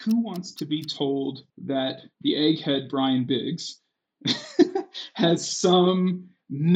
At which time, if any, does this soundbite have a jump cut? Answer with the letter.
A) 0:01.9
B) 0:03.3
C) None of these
A